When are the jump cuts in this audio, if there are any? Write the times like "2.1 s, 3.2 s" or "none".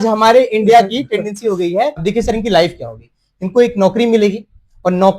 2.0 s